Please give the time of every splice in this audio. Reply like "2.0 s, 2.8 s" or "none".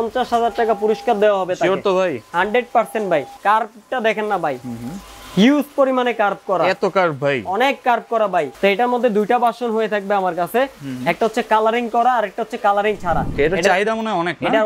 3.3 s, 8.5 s, 13.3 s